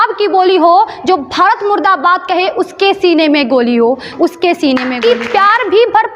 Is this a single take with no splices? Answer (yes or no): no